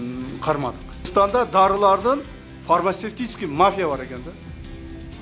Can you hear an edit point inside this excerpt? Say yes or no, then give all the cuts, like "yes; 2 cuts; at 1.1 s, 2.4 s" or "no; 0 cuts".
yes; 1 cut; at 1.1 s